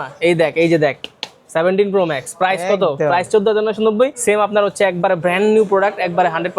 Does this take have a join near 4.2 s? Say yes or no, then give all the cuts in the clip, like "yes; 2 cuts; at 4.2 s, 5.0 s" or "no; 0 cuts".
yes; 1 cut; at 4.2 s